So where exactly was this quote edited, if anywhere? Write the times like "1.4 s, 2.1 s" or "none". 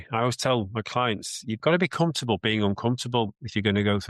1.6 s